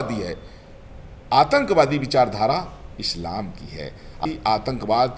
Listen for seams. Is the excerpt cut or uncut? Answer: cut